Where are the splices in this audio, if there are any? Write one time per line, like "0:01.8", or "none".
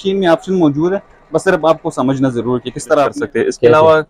0:03.1